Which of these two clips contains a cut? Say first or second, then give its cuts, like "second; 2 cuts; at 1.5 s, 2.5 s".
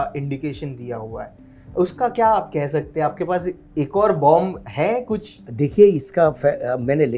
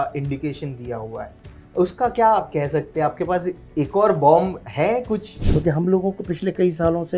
second; 1 cut; at 5.4 s